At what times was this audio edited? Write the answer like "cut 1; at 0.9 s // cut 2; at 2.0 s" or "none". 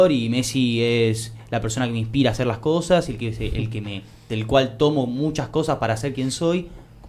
none